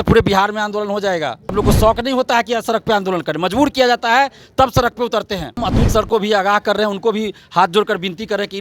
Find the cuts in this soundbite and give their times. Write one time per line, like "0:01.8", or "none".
0:01.5
0:05.6